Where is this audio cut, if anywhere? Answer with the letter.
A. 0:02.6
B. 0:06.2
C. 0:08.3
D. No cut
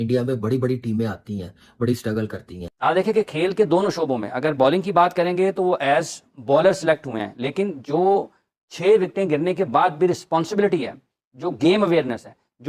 A